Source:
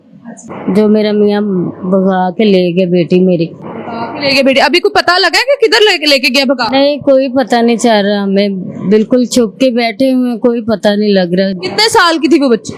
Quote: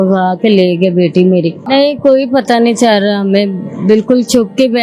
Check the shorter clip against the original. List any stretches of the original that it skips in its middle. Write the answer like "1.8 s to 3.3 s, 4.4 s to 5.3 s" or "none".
3.6 s to 6.7 s